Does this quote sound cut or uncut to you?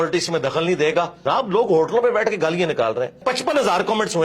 cut